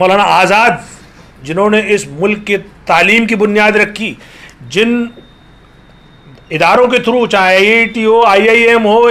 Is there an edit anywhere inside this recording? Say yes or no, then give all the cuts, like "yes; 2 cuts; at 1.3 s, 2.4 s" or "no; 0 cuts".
no; 0 cuts